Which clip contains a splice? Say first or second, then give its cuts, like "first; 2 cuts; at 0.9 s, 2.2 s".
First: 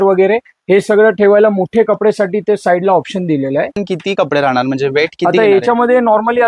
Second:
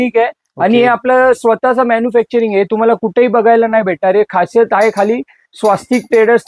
first; 1 cut; at 3.8 s